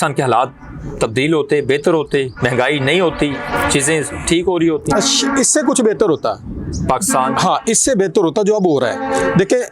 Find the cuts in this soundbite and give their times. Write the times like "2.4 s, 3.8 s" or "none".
none